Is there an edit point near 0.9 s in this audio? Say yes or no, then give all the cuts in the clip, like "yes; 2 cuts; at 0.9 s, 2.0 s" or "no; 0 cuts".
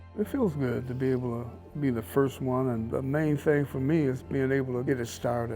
no; 2 cuts; at 2.9 s, 4.8 s